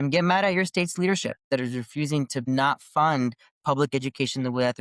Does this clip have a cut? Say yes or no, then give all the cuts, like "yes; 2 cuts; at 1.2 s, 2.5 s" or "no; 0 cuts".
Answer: yes; 2 cuts; at 1.4 s, 2.4 s